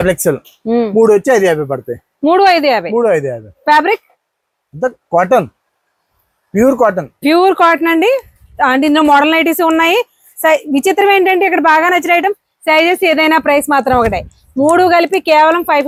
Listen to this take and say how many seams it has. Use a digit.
0